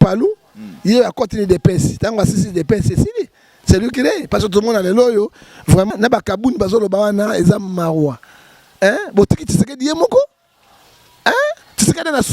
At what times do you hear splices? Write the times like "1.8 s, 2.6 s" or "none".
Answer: 5.9 s